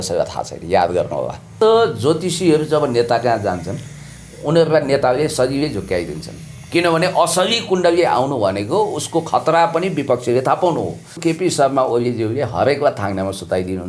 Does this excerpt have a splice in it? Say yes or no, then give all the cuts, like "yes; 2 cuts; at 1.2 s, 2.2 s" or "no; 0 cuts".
yes; 2 cuts; at 1.5 s, 11.2 s